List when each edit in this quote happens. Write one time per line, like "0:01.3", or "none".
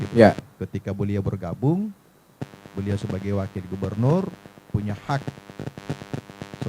none